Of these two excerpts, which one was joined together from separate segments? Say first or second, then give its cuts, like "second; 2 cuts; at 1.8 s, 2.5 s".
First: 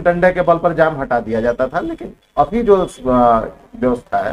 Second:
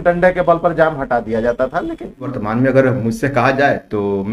second; 1 cut; at 2.3 s